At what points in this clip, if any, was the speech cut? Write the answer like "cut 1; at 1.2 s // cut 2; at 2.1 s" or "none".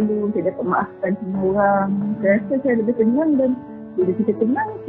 none